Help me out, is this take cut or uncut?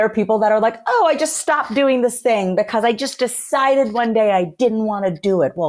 uncut